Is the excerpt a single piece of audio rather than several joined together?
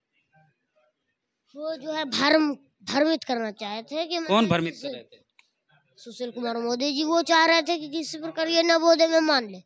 yes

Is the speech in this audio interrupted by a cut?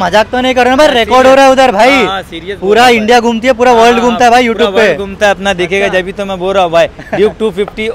no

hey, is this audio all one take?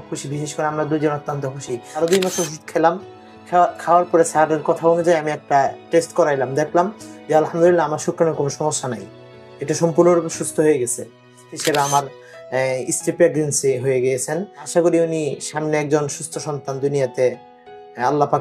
no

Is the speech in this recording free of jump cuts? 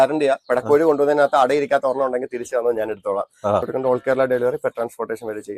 no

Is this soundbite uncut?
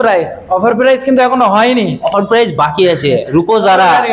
yes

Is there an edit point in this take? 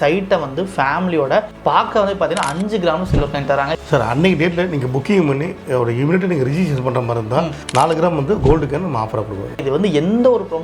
yes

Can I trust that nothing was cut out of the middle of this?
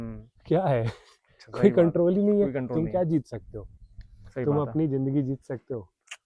yes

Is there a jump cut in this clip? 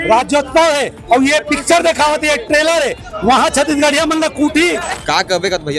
yes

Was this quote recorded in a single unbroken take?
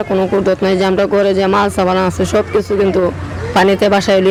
yes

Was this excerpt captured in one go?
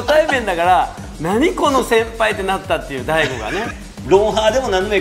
no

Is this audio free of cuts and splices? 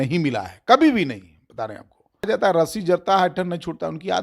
no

